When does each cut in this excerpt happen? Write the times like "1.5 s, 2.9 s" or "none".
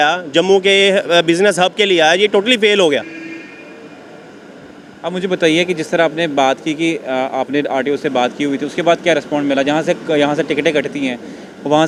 none